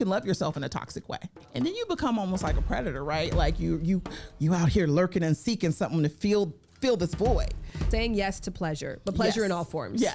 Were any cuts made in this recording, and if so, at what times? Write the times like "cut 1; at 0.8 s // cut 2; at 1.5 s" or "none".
cut 1; at 1.4 s // cut 2; at 7.8 s

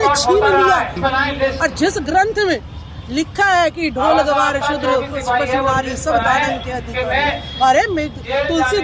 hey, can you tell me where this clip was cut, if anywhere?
cut 1; at 1.0 s

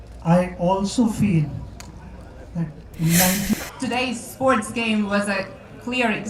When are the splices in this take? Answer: cut 1; at 3.5 s

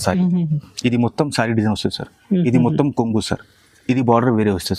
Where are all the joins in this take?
none

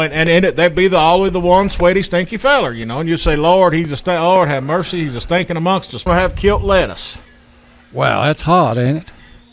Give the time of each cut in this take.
cut 1; at 6.1 s

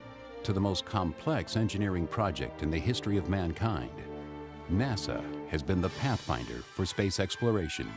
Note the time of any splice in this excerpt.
cut 1; at 1.0 s

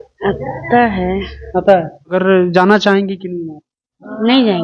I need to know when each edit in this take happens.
cut 1; at 2.1 s

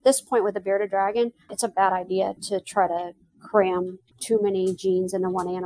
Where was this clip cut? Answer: cut 1; at 1.5 s // cut 2; at 2.4 s // cut 3; at 4.1 s

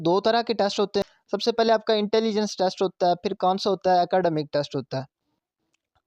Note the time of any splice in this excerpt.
cut 1; at 1.1 s

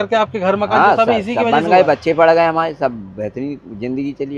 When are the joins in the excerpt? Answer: none

